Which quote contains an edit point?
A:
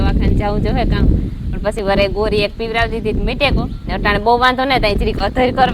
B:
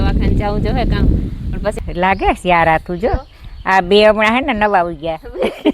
B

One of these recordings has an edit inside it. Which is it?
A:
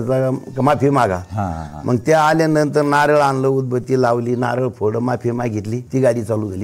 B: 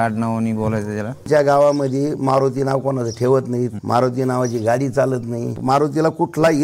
B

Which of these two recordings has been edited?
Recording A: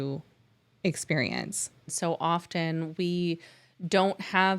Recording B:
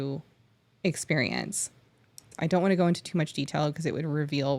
A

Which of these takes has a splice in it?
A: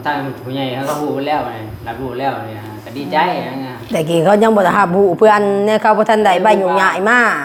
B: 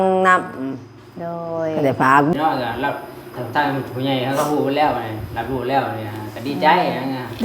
B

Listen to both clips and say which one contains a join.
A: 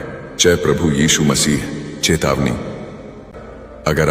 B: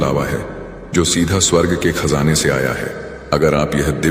A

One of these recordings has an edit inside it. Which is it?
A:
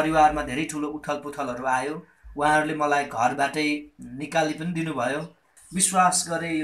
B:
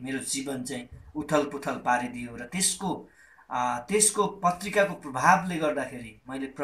A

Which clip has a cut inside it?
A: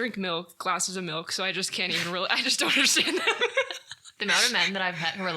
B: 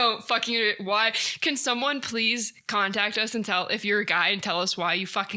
A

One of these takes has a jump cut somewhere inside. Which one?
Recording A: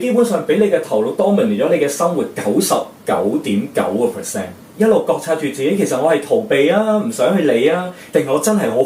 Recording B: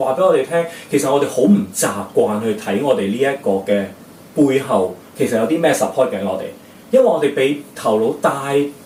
A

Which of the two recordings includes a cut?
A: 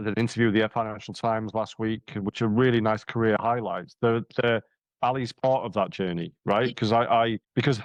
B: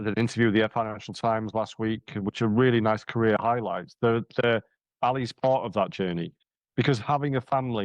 B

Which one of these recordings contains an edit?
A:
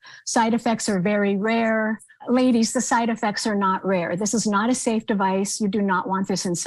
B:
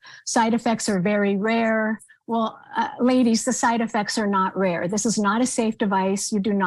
A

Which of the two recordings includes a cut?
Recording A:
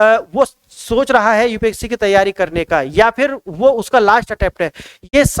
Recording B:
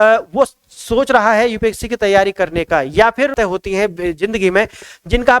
B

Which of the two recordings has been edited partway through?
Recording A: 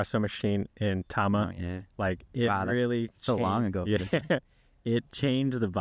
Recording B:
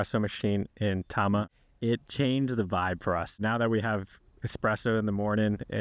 B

